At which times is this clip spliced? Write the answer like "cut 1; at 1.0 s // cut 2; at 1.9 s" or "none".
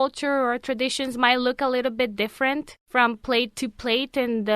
cut 1; at 2.8 s